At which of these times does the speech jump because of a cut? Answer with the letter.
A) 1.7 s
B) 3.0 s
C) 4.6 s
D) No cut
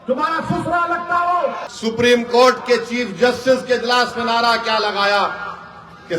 A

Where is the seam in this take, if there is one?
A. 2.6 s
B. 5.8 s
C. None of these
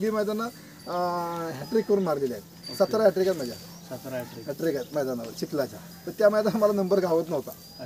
C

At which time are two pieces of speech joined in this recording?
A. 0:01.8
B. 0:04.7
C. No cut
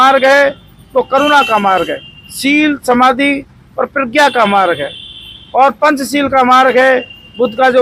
C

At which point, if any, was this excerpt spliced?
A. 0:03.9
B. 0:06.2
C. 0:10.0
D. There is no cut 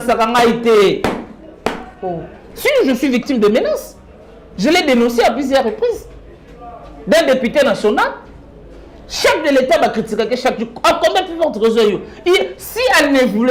D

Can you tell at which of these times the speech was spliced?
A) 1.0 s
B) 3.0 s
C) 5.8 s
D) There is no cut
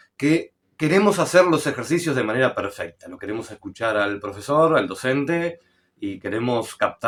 D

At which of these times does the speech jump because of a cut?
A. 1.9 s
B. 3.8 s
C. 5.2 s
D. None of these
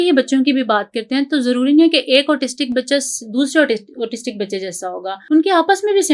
C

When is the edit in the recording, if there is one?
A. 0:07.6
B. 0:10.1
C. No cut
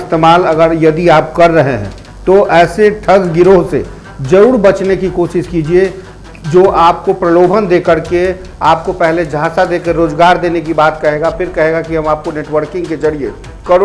C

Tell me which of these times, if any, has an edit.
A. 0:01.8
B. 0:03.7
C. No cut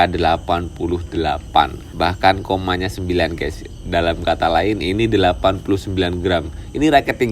A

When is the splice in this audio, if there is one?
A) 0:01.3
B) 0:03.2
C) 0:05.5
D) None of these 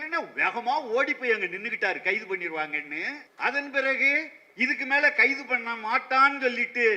B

